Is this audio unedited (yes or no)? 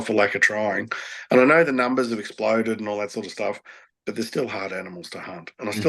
yes